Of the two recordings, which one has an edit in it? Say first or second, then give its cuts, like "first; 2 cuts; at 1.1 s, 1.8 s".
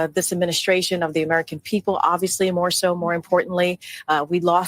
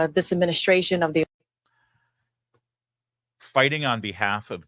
first; 1 cut; at 1.2 s